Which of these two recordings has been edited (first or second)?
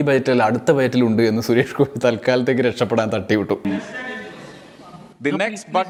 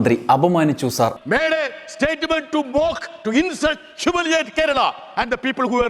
second